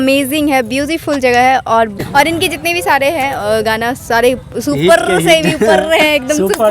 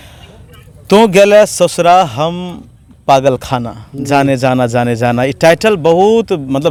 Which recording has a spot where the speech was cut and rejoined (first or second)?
first